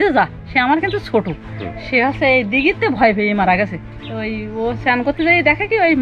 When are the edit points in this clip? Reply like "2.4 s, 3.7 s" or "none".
none